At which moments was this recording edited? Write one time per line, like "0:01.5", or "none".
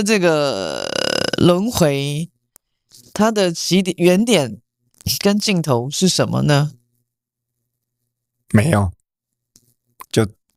none